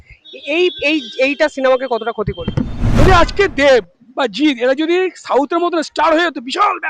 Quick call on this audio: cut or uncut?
cut